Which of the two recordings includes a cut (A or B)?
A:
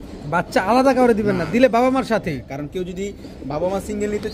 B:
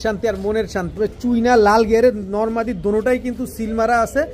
B